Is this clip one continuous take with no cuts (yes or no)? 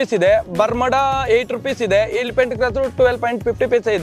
yes